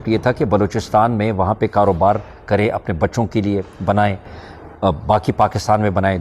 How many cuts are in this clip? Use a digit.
0